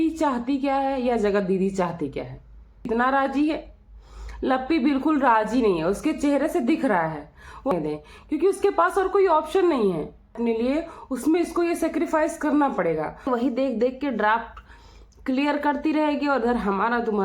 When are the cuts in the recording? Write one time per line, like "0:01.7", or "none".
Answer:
0:02.9
0:07.7
0:10.4
0:13.3